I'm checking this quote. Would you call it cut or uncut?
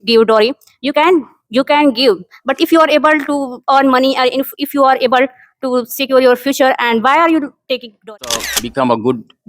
cut